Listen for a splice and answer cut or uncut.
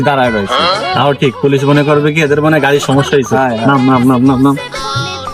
uncut